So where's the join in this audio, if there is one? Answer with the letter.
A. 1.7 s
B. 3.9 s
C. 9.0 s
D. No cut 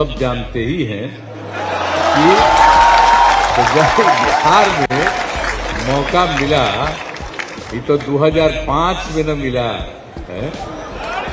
D